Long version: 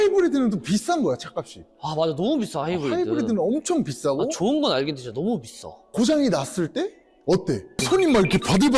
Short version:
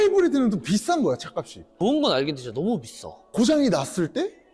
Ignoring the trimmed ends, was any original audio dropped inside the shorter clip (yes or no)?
yes